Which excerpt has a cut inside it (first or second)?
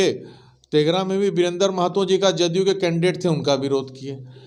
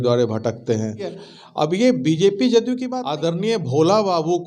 second